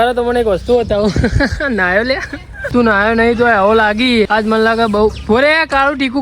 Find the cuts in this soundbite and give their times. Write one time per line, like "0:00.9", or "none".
0:02.6
0:04.3